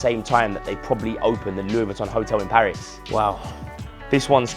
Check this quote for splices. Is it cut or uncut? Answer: cut